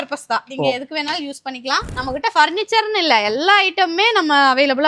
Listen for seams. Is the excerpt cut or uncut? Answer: cut